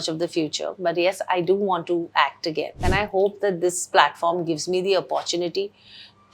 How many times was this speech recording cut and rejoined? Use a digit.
1